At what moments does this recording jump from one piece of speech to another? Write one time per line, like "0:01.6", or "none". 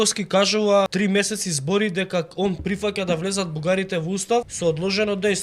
0:00.9
0:04.5